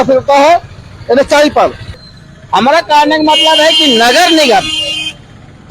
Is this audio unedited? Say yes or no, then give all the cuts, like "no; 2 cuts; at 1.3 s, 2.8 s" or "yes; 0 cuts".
no; 1 cut; at 2.0 s